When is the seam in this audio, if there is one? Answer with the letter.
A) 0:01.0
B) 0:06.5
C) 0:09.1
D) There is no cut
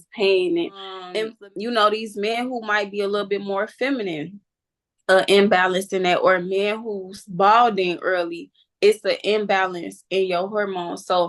A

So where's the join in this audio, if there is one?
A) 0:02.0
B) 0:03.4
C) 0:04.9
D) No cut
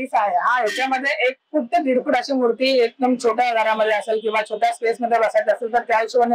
D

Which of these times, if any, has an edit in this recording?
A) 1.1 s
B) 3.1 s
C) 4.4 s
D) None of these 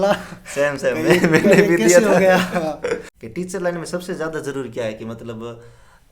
B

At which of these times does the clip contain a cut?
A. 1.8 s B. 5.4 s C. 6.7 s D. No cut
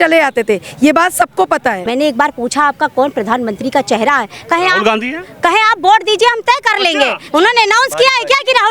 A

